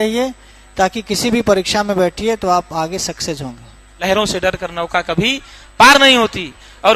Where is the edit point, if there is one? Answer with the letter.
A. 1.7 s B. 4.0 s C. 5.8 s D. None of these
B